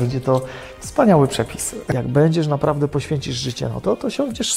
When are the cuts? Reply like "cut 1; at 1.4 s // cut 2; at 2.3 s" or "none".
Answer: cut 1; at 1.9 s

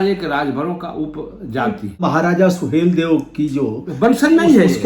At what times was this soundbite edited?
cut 1; at 2.0 s

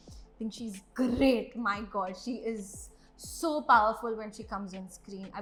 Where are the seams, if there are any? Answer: none

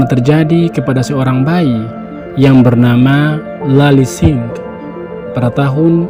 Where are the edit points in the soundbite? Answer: none

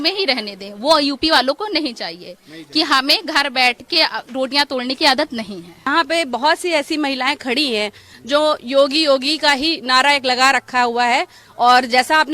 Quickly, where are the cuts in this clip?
cut 1; at 5.9 s

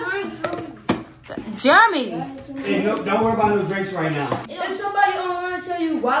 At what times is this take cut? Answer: cut 1; at 4.5 s

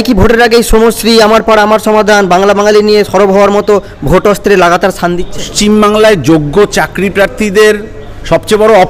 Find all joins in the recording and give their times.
cut 1; at 5.5 s

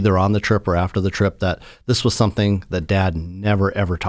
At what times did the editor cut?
none

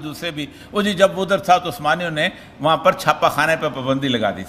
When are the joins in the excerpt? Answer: none

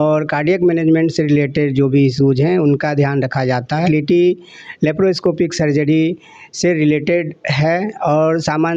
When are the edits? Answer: cut 1; at 3.8 s

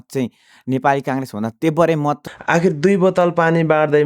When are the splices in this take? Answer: cut 1; at 2.2 s

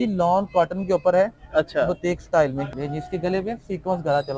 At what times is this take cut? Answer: cut 1; at 2.7 s

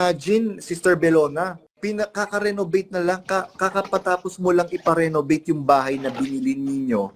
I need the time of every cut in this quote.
cut 1; at 1.6 s

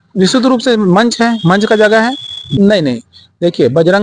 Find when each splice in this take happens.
cut 1; at 2.4 s

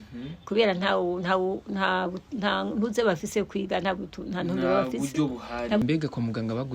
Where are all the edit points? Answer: cut 1; at 5.8 s

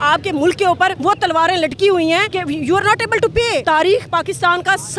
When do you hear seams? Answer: cut 1; at 1.0 s // cut 2; at 2.3 s // cut 3; at 3.6 s

